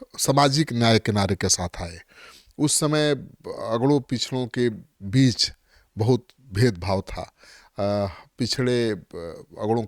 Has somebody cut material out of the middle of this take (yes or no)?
no